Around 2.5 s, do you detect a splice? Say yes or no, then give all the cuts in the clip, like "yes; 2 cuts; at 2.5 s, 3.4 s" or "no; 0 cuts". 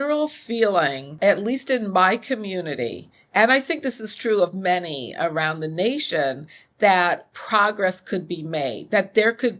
no; 1 cut; at 1.0 s